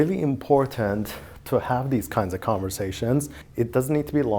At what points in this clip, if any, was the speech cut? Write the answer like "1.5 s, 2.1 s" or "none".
3.4 s